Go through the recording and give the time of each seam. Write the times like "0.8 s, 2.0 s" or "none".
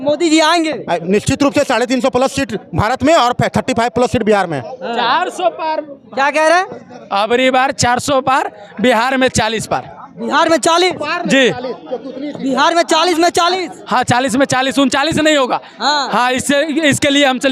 none